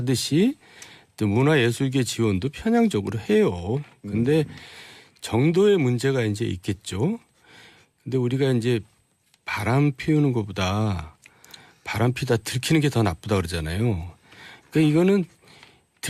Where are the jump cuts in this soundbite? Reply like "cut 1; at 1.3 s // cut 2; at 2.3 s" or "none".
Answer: none